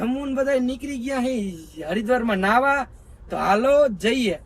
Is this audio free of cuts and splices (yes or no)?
yes